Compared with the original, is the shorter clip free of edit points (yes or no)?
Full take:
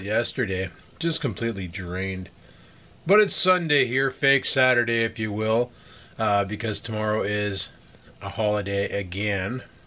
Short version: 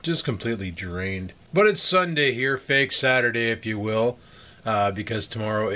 no